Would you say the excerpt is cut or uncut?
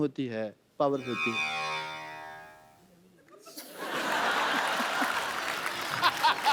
uncut